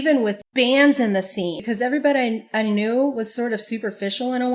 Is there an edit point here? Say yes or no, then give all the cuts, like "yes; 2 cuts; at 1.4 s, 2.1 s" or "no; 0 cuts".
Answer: yes; 1 cut; at 1.6 s